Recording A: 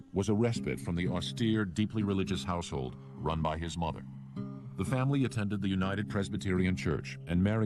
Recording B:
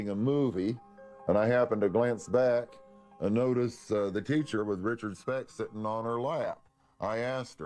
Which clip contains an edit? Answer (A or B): B